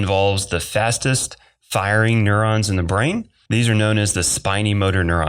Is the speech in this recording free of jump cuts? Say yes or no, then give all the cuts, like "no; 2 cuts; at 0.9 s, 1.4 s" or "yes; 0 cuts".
no; 1 cut; at 3.4 s